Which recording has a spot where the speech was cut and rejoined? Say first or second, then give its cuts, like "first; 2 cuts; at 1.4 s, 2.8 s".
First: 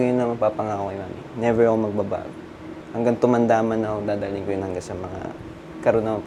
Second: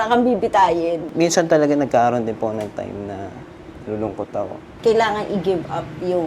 second; 2 cuts; at 1.1 s, 4.7 s